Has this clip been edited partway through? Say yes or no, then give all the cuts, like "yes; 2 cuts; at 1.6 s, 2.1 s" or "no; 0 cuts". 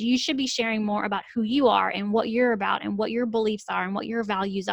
no; 0 cuts